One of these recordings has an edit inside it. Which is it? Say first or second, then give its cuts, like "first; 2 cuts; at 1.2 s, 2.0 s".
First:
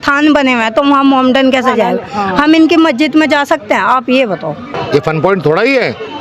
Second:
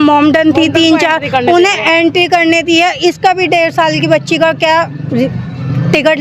first; 1 cut; at 4.7 s